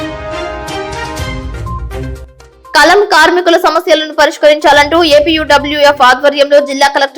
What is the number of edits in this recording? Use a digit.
1